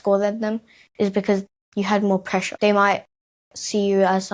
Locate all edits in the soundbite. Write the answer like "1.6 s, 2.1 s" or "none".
1.6 s, 2.5 s